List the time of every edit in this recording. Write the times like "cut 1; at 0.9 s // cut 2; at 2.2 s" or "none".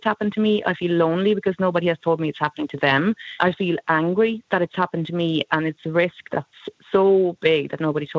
cut 1; at 3.3 s